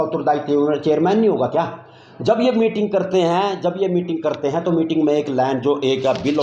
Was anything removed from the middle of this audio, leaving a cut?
no; 0 cuts

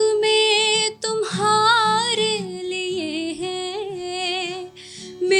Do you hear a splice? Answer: no; 0 cuts

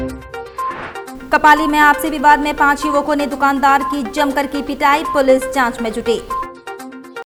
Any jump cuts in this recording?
no; 0 cuts

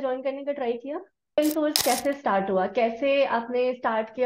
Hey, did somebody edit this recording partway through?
yes; 1 cut; at 1.4 s

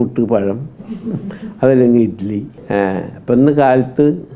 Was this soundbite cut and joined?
yes; 1 cut; at 2.5 s

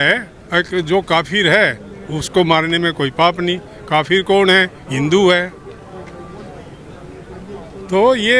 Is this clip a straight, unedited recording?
yes; 0 cuts

